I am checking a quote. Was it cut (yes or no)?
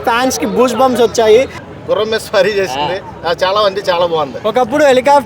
yes